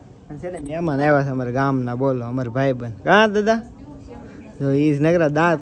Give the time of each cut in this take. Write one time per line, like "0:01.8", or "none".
none